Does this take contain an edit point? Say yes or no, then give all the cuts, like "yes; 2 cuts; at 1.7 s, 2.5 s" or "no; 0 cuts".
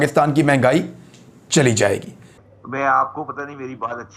yes; 1 cut; at 2.3 s